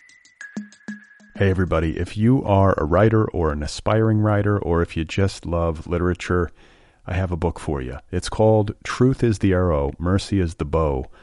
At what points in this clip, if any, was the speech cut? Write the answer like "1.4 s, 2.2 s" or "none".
0.9 s